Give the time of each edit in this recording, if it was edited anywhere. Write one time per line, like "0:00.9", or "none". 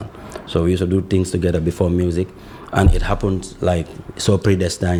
none